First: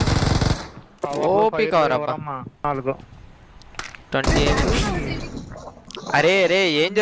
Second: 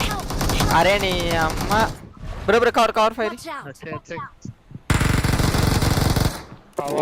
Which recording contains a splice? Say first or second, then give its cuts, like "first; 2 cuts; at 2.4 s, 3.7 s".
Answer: first; 1 cut; at 2.6 s